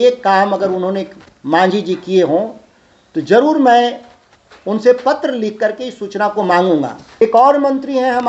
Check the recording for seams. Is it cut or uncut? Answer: cut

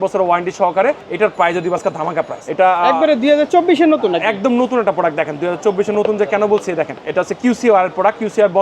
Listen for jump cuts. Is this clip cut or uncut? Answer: cut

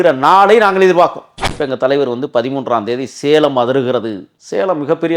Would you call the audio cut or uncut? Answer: cut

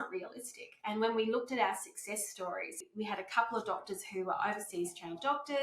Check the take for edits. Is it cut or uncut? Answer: cut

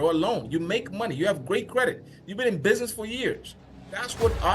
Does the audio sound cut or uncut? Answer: cut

